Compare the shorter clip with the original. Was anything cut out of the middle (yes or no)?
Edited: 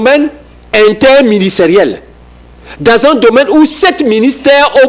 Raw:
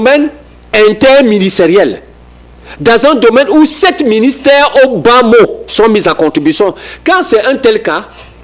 no